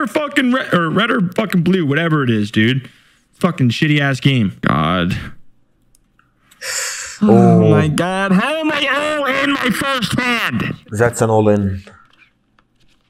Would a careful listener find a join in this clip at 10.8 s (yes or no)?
no